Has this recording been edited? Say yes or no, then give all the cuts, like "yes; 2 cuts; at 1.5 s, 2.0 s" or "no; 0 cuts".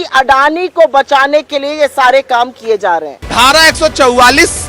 yes; 1 cut; at 3.2 s